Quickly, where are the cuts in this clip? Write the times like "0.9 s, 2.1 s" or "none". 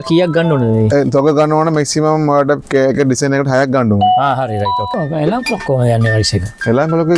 4.9 s